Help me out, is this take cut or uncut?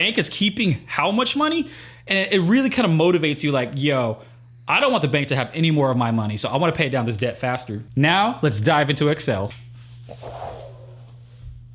uncut